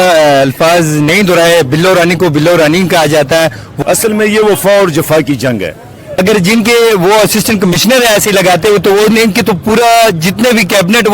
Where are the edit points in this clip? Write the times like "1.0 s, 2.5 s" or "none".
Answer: 3.6 s, 6.1 s